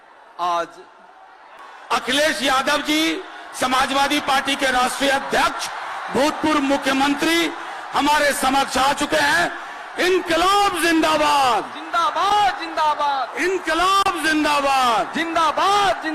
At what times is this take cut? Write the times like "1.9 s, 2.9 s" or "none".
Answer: 1.7 s